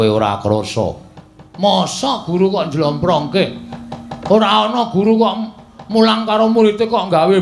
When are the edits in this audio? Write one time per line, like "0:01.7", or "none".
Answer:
none